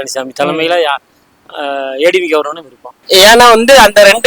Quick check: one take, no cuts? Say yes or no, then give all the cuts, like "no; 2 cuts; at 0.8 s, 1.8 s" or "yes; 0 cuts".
no; 1 cut; at 2.9 s